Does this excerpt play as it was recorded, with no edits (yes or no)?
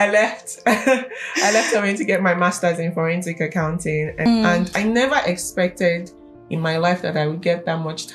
no